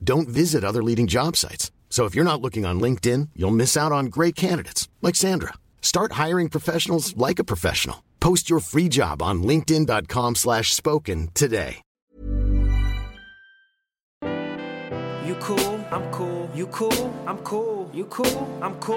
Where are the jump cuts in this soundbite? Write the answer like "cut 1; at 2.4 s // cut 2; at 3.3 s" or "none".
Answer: cut 1; at 12.1 s // cut 2; at 14.1 s